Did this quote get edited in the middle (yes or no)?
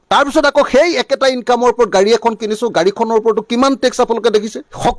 no